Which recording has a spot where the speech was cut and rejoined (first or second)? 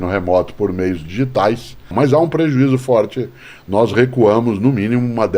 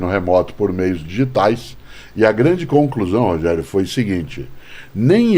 first